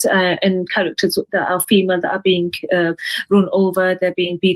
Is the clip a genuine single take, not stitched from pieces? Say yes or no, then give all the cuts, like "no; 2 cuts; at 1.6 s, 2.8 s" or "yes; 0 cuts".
yes; 0 cuts